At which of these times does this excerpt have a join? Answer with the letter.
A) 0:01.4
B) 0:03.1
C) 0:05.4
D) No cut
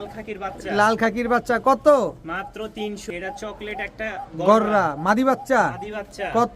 B